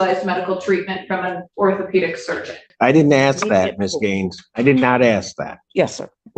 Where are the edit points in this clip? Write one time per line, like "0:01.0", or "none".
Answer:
0:02.7

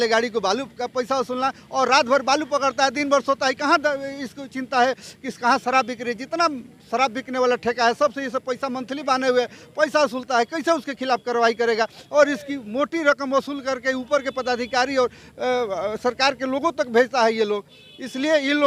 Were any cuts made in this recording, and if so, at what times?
none

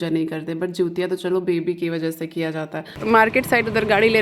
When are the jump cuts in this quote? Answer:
0:03.0

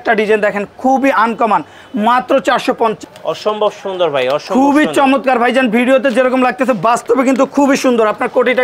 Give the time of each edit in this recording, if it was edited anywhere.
0:03.0

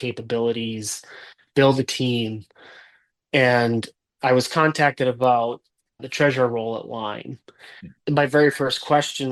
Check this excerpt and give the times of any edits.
none

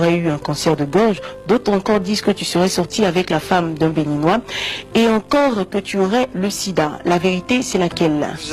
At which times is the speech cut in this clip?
none

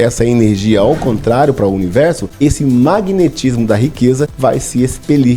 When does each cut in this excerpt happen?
0:02.3
0:04.3

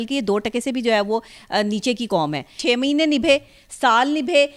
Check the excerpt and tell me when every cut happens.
0:02.6

